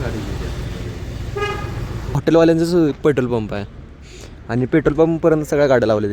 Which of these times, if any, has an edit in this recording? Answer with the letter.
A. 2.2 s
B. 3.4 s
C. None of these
A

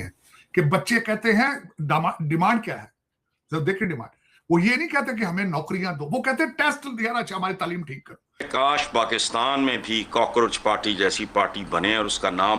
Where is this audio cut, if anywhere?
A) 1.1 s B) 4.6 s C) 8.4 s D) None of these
C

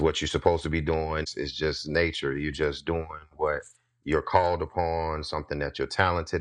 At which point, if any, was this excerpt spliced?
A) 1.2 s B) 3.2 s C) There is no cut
A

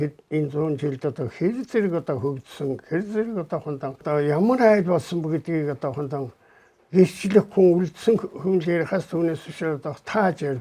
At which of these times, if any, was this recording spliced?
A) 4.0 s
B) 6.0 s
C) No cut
A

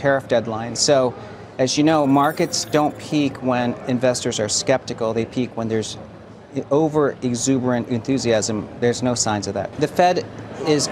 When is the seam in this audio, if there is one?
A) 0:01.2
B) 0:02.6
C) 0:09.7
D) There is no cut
C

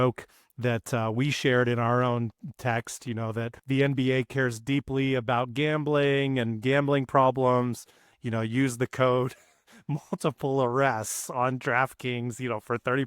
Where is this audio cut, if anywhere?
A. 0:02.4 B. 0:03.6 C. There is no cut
B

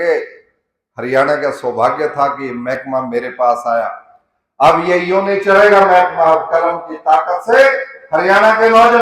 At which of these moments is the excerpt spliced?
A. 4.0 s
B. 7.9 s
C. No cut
C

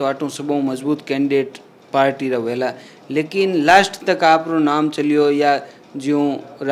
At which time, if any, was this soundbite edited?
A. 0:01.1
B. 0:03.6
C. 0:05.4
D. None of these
D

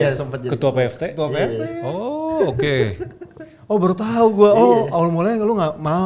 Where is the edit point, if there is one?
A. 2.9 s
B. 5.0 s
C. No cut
C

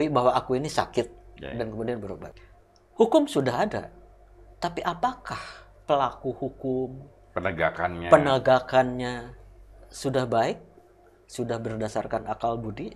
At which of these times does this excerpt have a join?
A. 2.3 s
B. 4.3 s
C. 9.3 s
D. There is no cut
A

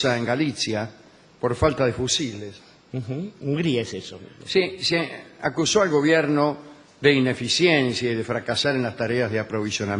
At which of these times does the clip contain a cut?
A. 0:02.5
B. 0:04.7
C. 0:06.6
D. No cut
C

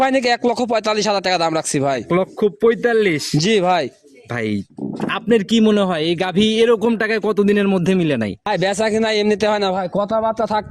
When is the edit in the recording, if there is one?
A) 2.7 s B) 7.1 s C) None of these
C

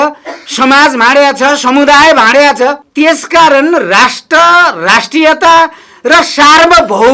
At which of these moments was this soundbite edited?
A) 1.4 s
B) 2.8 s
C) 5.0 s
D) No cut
B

